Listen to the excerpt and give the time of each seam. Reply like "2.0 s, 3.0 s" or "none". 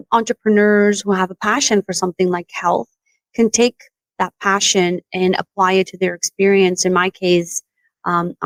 none